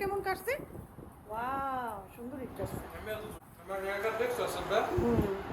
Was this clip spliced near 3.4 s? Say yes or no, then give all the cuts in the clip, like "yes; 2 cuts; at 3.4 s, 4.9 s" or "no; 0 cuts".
yes; 1 cut; at 3.4 s